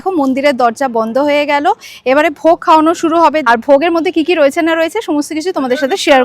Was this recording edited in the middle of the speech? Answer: yes; 1 cut; at 3.4 s

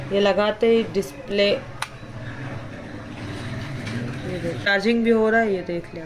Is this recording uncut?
no; 1 cut; at 4.7 s

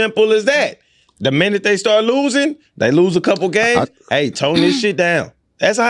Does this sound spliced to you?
no; 0 cuts

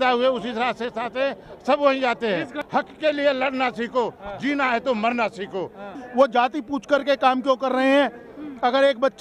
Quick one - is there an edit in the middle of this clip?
yes; 2 cuts; at 2.6 s, 5.9 s

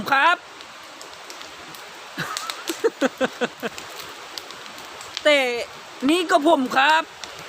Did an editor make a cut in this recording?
yes; 1 cut; at 3.8 s

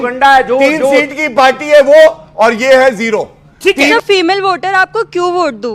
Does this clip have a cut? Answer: yes; 1 cut; at 3.8 s

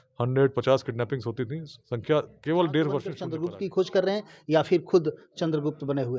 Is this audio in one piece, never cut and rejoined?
no; 1 cut; at 3.2 s

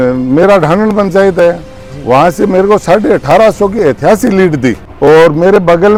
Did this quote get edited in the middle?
no; 0 cuts

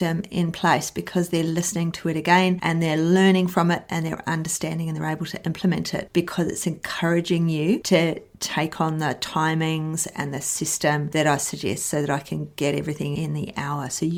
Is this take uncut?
yes; 0 cuts

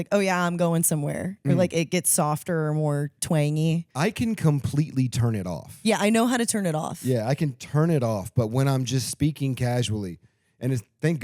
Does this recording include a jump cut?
yes; 1 cut; at 3.9 s

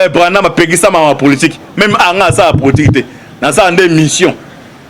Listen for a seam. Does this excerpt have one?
no; 0 cuts

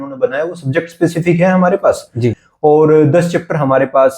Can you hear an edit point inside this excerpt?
yes; 1 cut; at 2.5 s

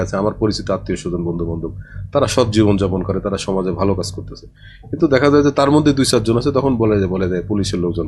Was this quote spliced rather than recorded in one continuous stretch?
no; 0 cuts

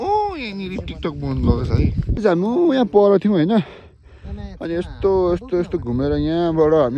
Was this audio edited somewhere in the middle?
yes; 1 cut; at 2.2 s

